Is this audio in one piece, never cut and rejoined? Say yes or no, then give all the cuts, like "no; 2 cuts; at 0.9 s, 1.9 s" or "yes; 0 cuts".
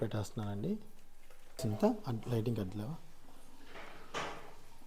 no; 1 cut; at 1.6 s